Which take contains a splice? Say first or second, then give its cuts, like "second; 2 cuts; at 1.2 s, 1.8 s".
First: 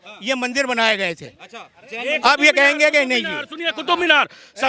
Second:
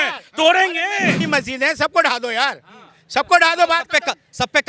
second; 1 cut; at 1.2 s